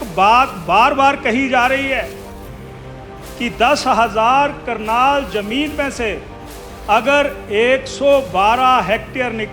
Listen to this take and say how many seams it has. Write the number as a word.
two